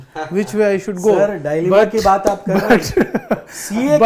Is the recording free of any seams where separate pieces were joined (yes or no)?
yes